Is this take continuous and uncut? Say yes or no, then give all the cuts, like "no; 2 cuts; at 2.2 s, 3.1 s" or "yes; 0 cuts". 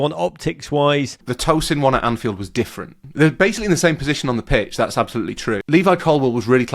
no; 3 cuts; at 1.3 s, 3.0 s, 5.6 s